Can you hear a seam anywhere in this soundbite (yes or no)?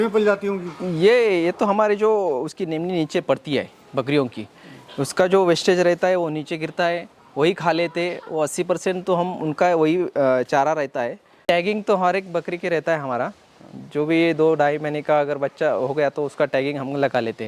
yes